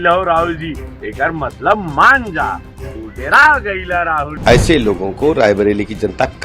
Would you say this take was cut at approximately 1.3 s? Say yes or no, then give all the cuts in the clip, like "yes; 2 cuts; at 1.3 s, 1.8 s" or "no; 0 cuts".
no; 1 cut; at 4.3 s